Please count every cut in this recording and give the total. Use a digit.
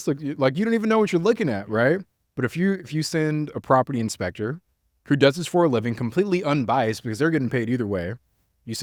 0